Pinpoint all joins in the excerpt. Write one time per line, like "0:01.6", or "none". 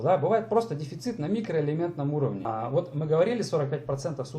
0:02.4